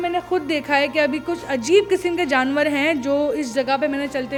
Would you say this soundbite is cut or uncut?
uncut